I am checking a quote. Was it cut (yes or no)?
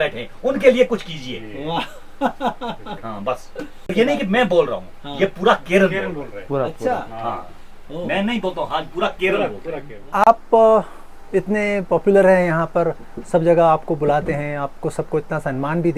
yes